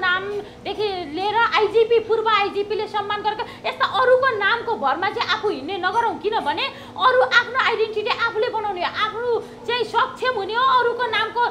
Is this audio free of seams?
yes; 0 cuts

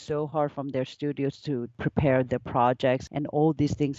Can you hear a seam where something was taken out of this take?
yes; 2 cuts; at 1.8 s, 3.0 s

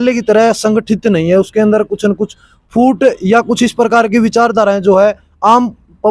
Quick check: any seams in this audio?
no; 0 cuts

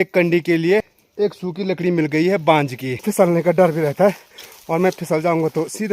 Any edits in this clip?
yes; 2 cuts; at 1.0 s, 3.0 s

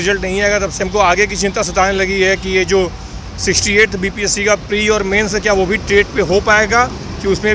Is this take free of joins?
yes; 0 cuts

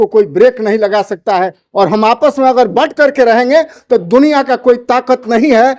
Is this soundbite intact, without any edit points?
yes; 0 cuts

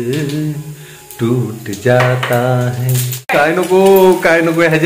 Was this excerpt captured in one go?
no; 1 cut; at 3.2 s

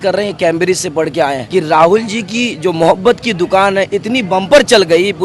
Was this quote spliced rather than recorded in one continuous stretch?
yes; 1 cut; at 1.4 s

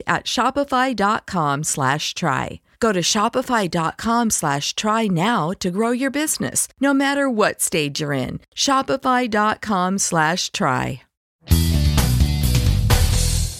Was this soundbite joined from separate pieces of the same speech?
yes; 1 cut; at 11.2 s

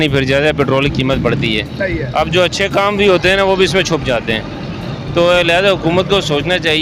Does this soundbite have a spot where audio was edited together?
no; 0 cuts

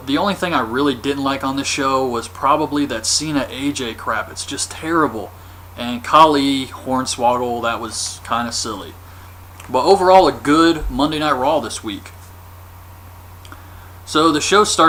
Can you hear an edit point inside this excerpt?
no; 0 cuts

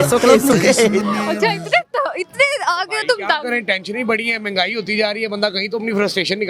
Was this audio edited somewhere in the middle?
yes; 1 cut; at 1.0 s

